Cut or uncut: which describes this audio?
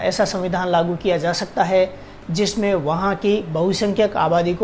uncut